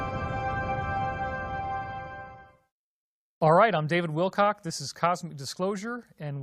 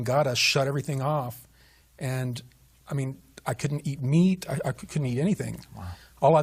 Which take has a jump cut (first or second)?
second